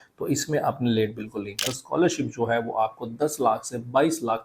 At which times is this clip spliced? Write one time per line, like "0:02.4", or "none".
0:01.7